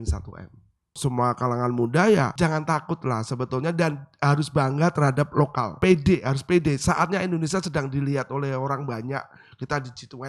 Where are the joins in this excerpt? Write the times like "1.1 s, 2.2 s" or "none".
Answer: 1.0 s, 2.3 s, 5.7 s